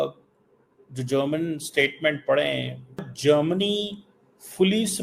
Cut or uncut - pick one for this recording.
cut